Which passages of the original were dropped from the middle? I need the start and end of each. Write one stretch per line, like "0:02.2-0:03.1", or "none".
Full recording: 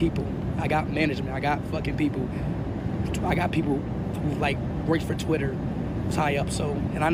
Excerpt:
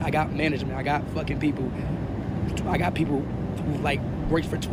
none